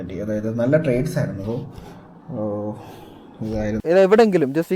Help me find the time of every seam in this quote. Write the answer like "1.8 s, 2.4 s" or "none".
3.8 s

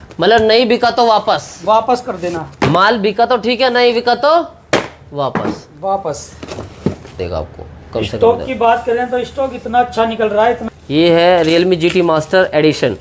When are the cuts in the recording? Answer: 7.2 s, 10.6 s

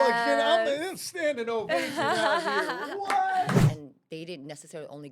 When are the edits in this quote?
3.7 s

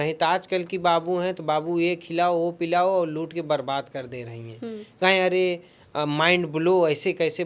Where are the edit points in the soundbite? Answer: none

